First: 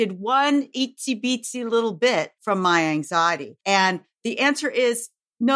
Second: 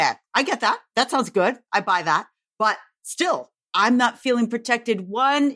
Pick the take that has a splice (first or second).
first